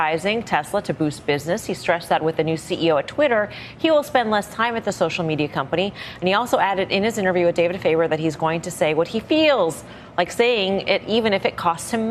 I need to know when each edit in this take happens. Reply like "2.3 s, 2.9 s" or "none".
none